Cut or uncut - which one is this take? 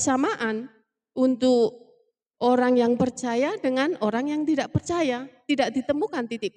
uncut